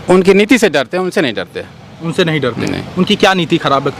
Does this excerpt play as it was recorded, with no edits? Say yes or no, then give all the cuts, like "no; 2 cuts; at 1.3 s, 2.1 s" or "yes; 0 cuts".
yes; 0 cuts